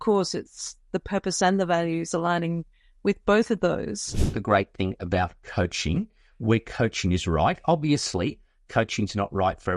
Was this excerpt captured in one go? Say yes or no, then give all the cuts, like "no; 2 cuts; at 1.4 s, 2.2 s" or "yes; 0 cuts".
no; 1 cut; at 4.2 s